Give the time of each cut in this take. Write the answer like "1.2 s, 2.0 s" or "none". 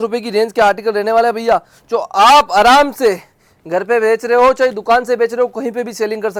none